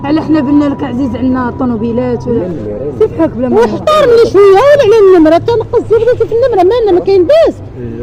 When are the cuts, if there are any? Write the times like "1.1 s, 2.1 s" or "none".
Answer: 2.4 s